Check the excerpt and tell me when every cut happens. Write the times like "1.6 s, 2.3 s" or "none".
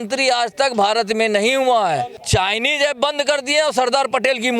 2.2 s

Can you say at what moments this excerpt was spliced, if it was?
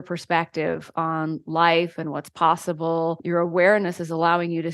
3.2 s

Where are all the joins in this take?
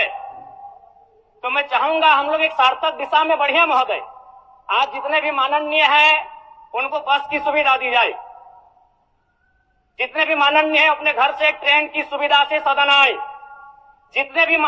none

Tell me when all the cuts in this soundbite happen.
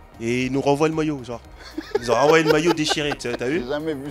none

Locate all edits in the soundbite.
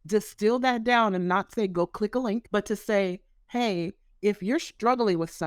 2.5 s

